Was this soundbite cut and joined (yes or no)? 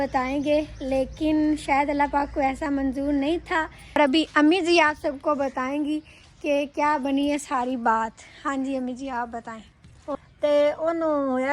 yes